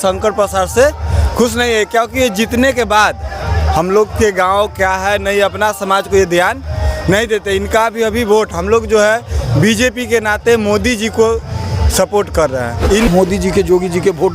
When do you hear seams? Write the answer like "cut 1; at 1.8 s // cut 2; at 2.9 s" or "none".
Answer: cut 1; at 13.1 s